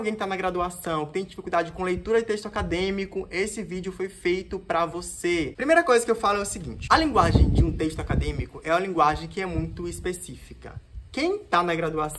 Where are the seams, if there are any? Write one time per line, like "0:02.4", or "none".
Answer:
none